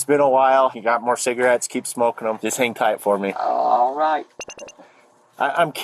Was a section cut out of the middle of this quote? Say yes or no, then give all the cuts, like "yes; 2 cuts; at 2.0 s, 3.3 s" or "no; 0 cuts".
yes; 3 cuts; at 0.9 s, 2.4 s, 3.4 s